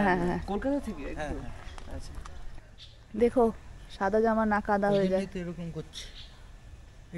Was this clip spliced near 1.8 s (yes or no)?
no